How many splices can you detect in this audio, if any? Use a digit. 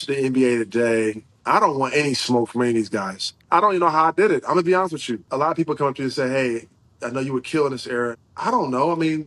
4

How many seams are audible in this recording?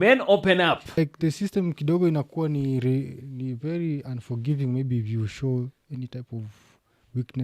1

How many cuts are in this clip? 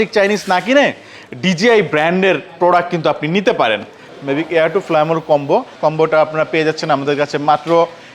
2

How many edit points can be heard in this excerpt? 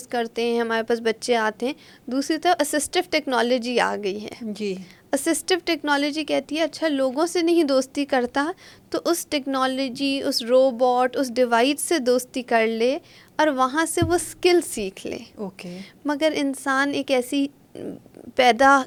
0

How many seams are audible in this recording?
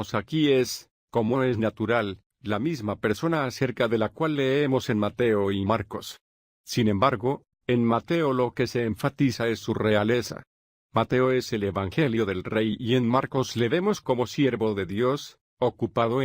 1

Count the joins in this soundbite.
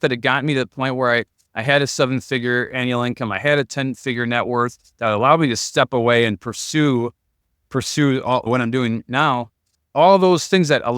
1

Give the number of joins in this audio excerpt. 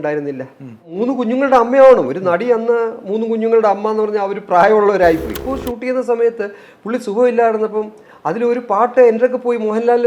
2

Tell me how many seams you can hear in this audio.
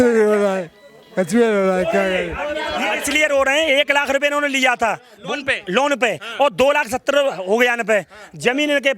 1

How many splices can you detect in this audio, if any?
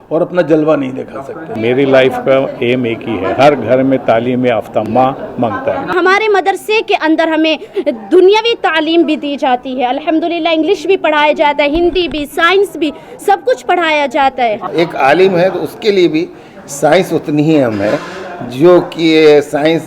4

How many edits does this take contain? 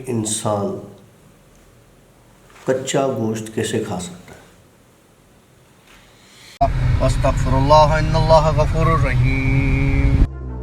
1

